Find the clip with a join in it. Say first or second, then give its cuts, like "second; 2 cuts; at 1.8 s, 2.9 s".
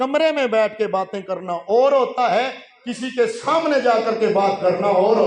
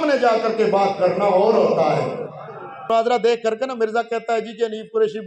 second; 1 cut; at 2.8 s